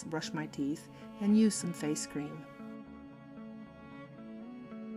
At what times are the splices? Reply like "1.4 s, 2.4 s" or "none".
none